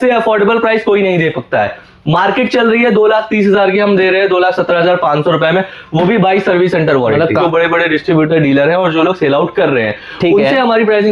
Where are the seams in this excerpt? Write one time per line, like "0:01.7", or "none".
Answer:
0:07.3